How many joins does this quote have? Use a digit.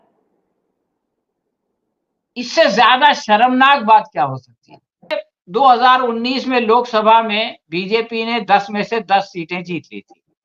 1